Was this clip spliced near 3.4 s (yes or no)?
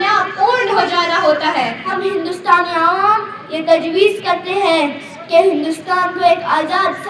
no